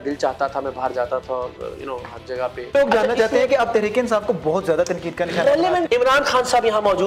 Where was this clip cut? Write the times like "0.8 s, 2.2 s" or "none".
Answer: 2.7 s, 5.9 s